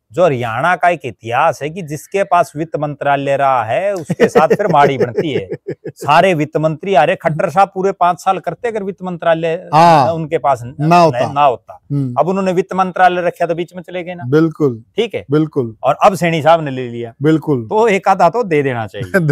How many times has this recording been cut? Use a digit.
0